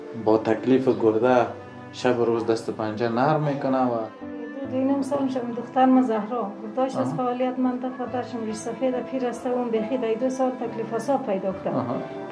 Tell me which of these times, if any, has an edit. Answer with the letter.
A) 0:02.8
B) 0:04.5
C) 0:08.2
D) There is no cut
B